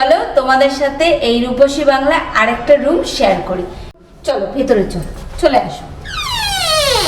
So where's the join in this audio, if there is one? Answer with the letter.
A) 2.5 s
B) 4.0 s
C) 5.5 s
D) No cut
B